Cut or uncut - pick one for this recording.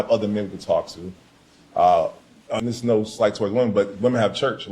cut